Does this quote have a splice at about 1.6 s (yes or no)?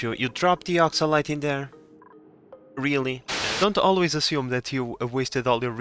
no